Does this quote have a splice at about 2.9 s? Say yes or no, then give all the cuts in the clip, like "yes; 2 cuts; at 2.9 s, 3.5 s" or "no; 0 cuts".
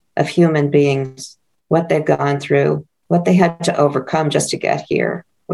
yes; 1 cut; at 2.9 s